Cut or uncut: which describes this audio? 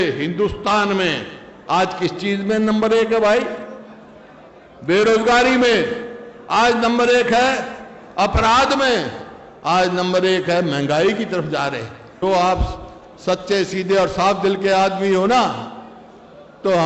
cut